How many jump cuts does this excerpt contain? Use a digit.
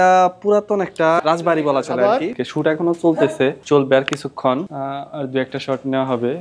0